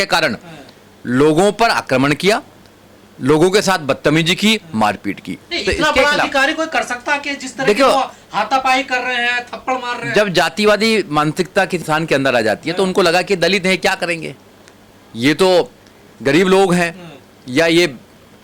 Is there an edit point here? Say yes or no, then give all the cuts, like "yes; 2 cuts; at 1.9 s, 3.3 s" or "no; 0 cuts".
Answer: no; 0 cuts